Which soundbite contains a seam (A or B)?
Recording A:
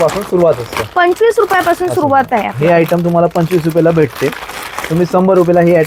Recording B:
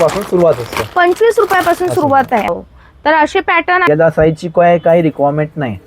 B